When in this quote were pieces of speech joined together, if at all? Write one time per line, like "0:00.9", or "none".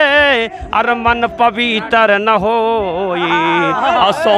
none

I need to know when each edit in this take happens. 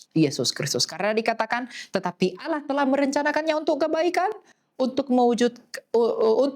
none

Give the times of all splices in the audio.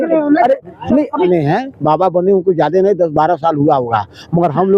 0:01.2

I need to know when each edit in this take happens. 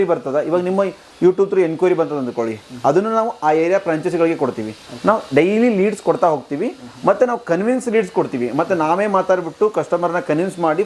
none

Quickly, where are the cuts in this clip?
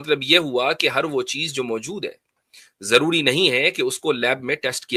none

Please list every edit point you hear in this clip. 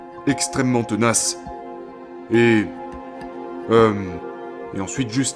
none

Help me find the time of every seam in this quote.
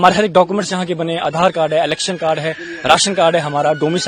none

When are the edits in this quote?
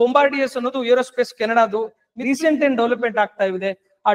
0:02.1

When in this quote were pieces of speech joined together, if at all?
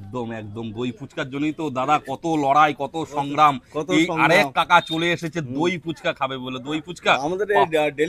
none

